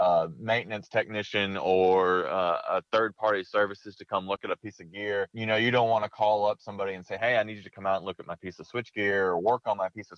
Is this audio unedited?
yes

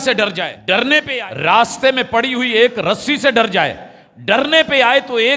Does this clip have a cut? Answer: yes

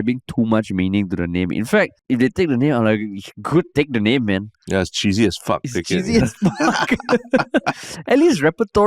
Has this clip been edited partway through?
yes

